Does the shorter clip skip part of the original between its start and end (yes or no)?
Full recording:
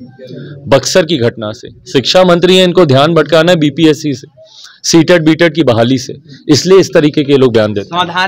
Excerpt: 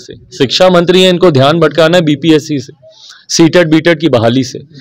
no